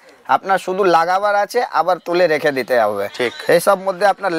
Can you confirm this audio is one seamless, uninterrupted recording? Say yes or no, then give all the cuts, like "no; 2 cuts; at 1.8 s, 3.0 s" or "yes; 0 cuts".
yes; 0 cuts